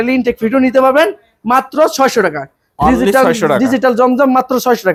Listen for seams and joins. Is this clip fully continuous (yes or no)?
yes